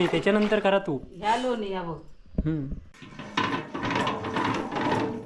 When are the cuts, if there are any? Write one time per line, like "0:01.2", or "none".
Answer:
0:02.8

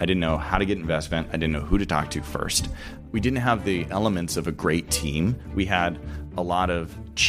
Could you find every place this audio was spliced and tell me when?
0:03.0

